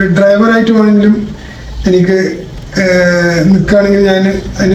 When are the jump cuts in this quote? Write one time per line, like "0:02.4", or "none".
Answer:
none

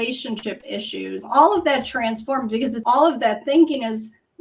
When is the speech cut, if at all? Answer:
0:01.3
0:02.8

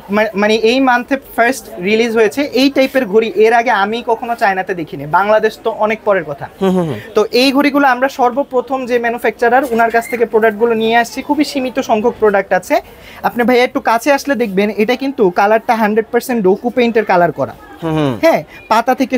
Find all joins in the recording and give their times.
none

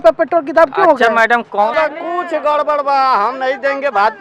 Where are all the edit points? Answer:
0:01.7

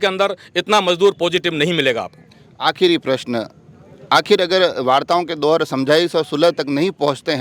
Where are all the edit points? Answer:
none

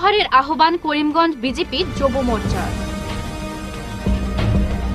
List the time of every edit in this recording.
none

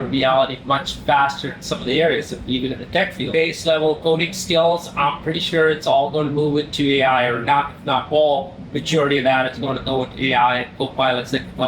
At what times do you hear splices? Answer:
0:03.2

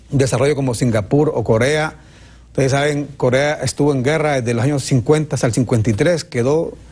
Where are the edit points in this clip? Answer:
0:02.9

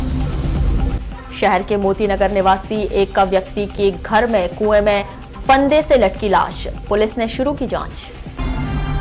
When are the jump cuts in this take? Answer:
none

